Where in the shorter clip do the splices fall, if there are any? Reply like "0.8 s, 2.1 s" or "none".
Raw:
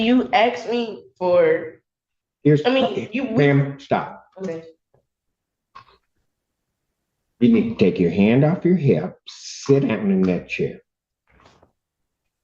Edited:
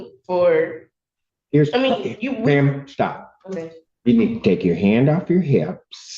3.8 s